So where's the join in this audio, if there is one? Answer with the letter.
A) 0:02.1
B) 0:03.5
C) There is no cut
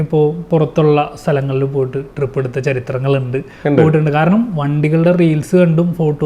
C